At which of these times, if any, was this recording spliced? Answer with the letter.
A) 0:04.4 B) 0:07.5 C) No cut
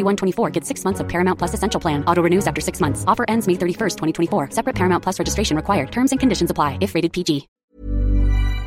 B